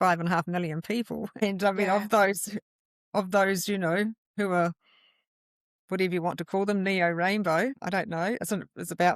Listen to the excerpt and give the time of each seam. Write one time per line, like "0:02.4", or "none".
0:01.3
0:04.2
0:07.8